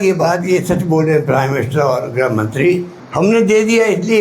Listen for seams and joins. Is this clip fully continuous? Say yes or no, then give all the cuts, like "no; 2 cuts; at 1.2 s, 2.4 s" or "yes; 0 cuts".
no; 1 cut; at 3.0 s